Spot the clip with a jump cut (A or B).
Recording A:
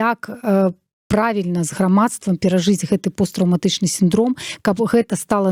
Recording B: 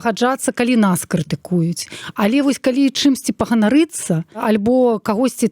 B